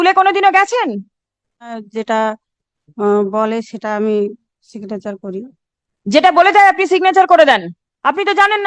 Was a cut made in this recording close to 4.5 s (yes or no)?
no